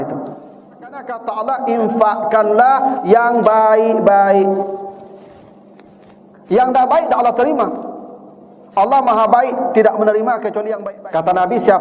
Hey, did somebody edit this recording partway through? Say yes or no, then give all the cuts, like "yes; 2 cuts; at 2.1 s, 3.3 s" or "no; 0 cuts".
yes; 2 cuts; at 1.1 s, 10.7 s